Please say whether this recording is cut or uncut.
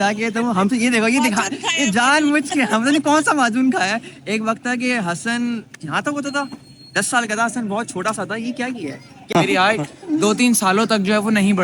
cut